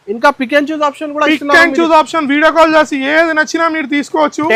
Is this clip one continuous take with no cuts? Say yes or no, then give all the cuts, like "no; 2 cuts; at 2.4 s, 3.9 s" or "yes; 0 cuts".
yes; 0 cuts